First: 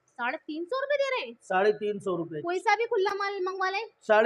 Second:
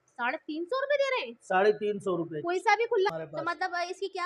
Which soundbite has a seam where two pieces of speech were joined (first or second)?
second